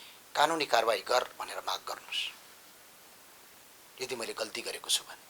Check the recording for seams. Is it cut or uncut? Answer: uncut